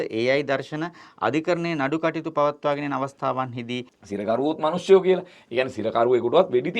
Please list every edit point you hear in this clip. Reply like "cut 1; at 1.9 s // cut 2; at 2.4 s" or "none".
cut 1; at 4.0 s